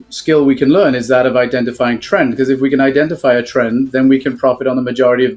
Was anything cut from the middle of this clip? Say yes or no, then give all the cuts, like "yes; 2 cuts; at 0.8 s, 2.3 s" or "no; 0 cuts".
no; 0 cuts